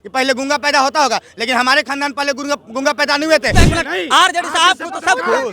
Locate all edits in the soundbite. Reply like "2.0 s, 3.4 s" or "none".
3.5 s